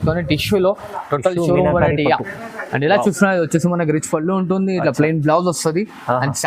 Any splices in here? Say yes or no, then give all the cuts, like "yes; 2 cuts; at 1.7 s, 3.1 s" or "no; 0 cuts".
no; 0 cuts